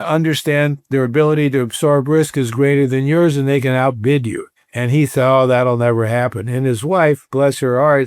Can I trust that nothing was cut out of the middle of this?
yes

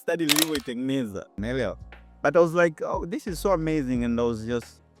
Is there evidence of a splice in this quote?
yes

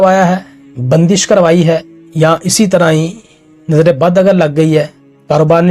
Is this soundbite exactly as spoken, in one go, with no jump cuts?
no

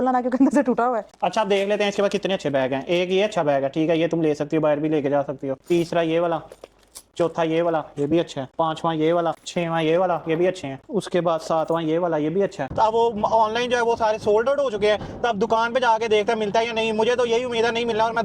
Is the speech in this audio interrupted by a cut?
yes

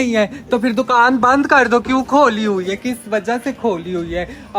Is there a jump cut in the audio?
no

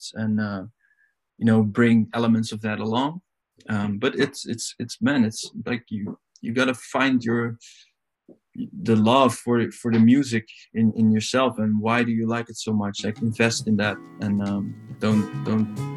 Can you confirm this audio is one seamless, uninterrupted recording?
yes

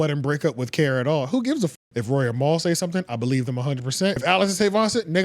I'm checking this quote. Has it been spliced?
yes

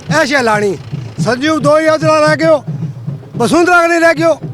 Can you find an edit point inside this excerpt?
no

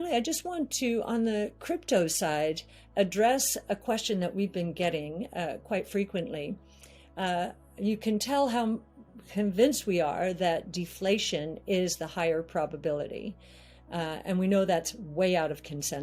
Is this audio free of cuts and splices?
yes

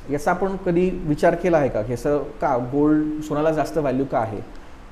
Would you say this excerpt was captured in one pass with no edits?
yes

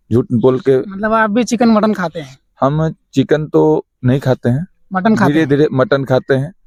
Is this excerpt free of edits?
yes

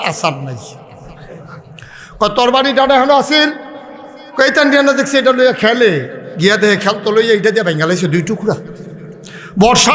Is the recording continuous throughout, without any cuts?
yes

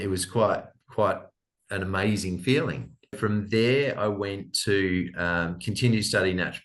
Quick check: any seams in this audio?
yes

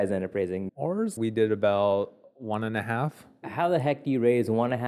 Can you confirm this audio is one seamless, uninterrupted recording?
no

